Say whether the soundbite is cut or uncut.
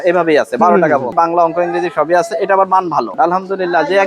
cut